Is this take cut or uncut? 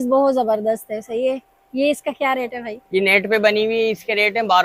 uncut